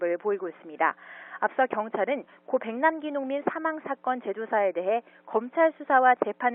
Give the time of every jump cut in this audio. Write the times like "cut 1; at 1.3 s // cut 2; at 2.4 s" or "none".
none